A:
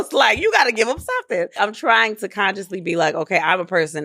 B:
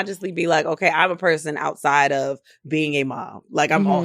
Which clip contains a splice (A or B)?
A